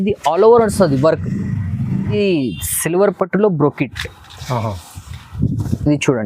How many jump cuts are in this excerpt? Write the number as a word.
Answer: one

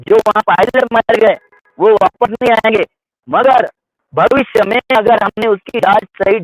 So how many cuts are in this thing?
zero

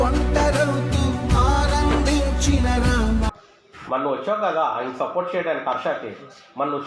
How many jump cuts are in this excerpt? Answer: one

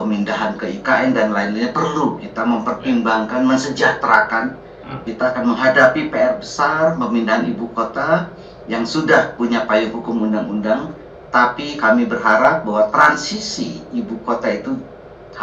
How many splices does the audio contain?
one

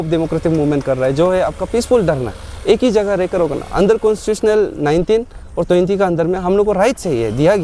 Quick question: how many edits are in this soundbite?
zero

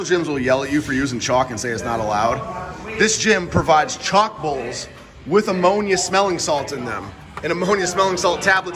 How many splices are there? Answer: zero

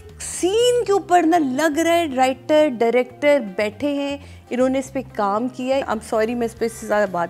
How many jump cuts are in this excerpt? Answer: one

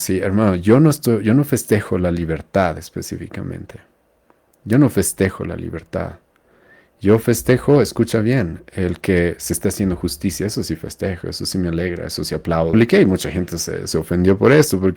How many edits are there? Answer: one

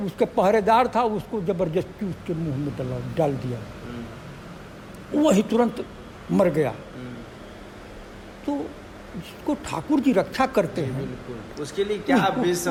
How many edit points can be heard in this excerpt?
zero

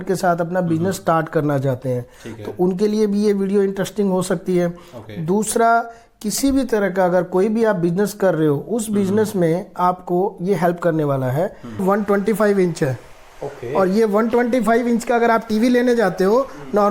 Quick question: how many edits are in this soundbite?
one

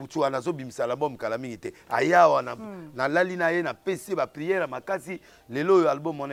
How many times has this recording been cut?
zero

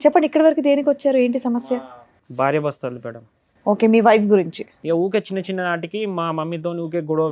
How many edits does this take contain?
one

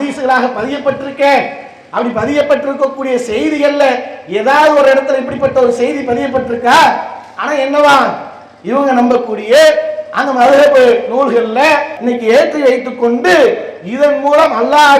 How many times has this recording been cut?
one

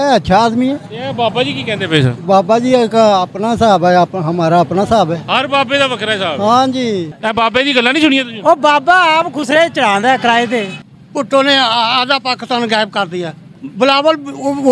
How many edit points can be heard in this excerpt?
three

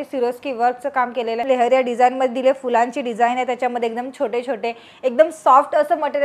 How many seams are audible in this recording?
one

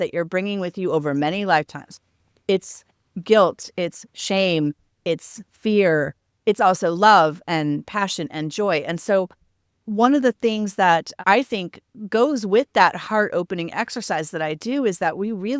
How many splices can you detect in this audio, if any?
one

